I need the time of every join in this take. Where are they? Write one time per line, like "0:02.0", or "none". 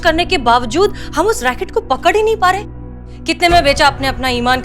0:02.9